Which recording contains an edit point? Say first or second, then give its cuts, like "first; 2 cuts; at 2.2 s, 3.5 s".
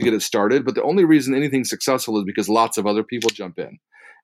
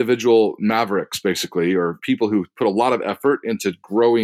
second; 1 cut; at 2.0 s